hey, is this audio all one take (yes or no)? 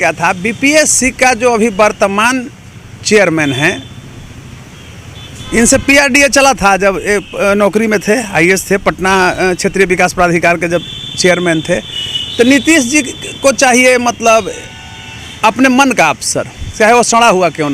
yes